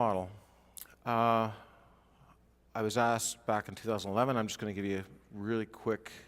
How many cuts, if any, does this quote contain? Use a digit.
1